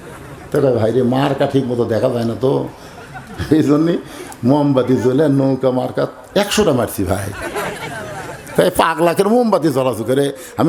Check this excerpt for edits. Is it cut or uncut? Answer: uncut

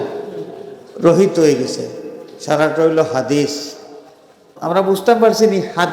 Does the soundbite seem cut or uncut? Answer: cut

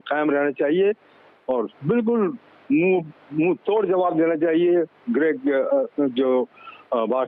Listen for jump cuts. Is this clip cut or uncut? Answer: uncut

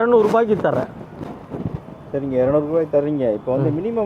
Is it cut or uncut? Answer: uncut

